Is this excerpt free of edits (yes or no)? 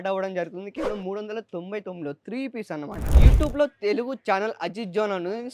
no